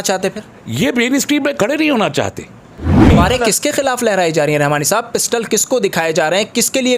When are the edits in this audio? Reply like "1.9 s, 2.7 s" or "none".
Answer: 3.1 s